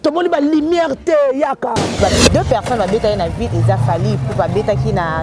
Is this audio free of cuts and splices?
no; 1 cut; at 2.0 s

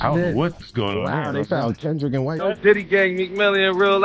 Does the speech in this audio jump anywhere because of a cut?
yes; 1 cut; at 2.4 s

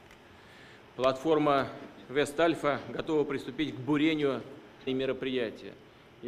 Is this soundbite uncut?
yes; 0 cuts

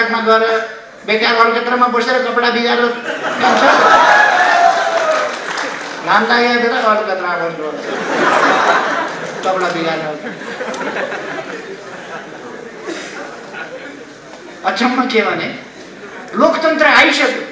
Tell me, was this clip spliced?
no; 0 cuts

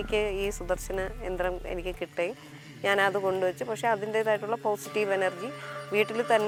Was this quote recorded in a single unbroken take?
yes; 0 cuts

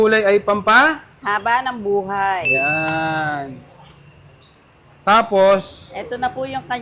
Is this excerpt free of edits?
yes; 0 cuts

